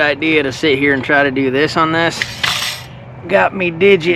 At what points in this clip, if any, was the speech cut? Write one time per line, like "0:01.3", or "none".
none